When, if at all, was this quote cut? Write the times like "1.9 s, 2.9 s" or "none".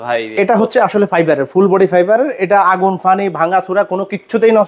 none